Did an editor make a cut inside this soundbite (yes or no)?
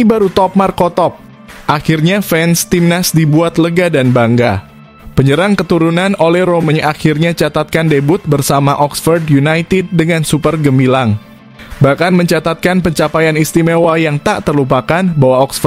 no